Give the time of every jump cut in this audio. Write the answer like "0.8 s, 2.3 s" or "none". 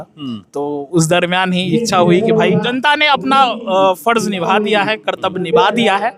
2.7 s